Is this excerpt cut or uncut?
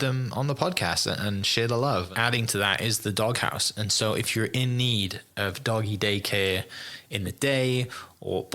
cut